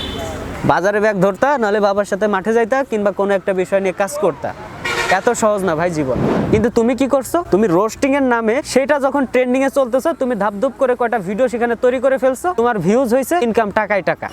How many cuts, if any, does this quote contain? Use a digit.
1